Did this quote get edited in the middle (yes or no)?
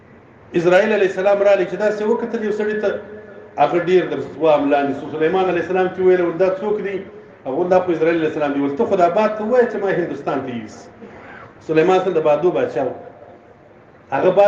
no